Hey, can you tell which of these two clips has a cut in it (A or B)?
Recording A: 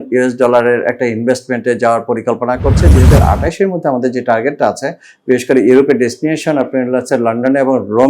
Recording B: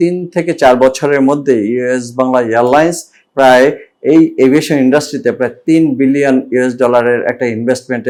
A